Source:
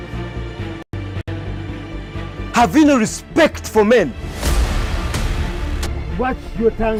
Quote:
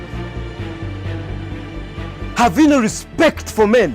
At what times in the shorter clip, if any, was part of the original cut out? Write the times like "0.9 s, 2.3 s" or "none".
1.0 s